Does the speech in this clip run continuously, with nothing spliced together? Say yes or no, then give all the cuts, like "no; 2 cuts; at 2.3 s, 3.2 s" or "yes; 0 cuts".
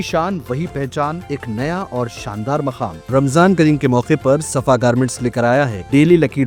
yes; 0 cuts